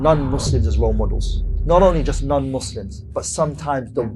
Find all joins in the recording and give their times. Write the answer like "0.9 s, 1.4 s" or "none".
none